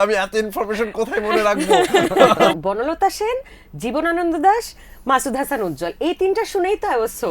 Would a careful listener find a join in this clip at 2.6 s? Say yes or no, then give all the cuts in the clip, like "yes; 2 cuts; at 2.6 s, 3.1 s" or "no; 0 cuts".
yes; 1 cut; at 2.6 s